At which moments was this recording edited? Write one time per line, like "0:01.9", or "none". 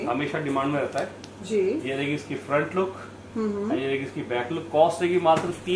none